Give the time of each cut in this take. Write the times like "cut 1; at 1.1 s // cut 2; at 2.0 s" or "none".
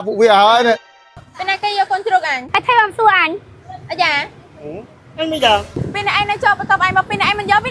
cut 1; at 0.9 s // cut 2; at 2.4 s // cut 3; at 5.8 s